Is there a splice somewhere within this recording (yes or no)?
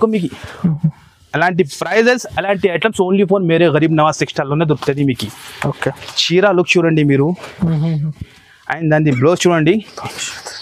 no